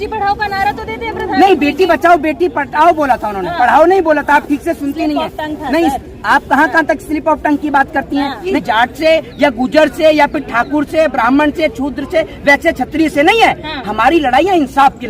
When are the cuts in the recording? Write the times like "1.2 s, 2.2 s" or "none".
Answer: 8.6 s

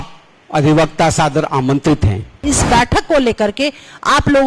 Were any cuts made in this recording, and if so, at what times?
2.4 s

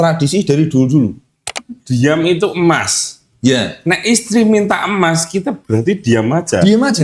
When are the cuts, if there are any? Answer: 1.5 s

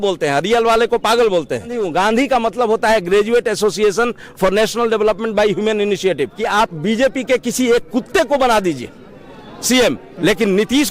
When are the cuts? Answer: 1.9 s, 6.4 s

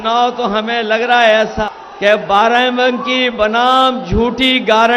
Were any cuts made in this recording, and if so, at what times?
1.6 s

